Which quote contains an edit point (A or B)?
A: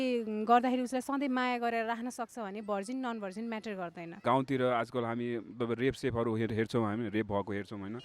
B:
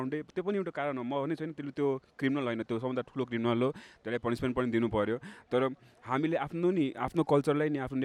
A